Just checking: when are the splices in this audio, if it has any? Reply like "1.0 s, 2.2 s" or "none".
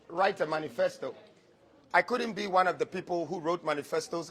none